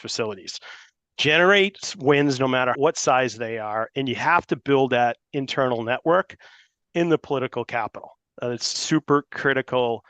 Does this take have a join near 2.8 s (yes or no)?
yes